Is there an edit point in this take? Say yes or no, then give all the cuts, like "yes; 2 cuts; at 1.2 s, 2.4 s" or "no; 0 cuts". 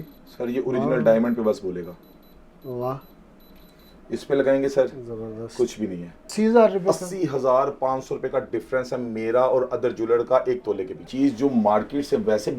yes; 2 cuts; at 6.3 s, 11.1 s